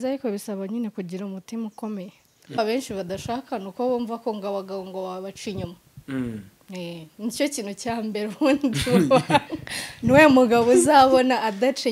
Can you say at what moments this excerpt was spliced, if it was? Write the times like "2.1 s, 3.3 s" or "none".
2.6 s